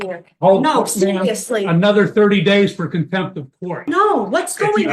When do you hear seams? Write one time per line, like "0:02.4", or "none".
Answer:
0:03.8